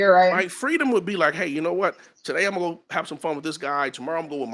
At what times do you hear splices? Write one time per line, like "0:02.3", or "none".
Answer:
none